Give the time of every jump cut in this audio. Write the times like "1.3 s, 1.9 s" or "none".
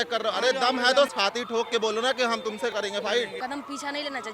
1.1 s, 2.7 s, 3.4 s